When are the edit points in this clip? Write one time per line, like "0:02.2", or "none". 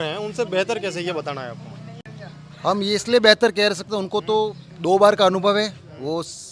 none